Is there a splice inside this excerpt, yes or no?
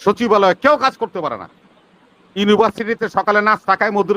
no